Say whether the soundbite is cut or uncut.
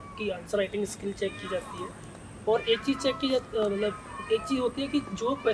uncut